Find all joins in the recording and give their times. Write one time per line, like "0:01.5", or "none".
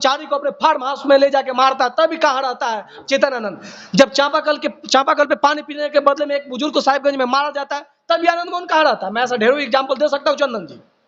none

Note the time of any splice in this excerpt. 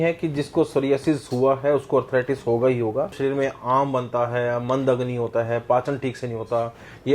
0:03.2

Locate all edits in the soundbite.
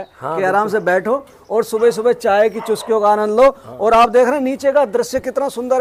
none

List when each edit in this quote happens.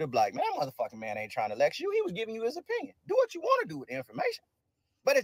0:02.9

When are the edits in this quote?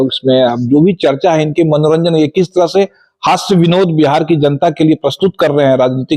none

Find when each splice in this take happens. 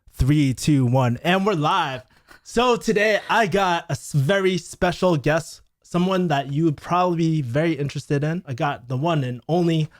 0:08.5

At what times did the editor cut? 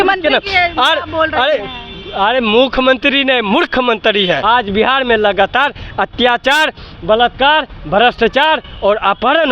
0:04.4

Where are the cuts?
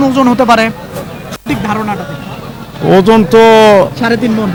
none

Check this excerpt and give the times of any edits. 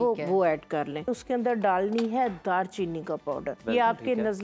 0:01.1
0:03.6

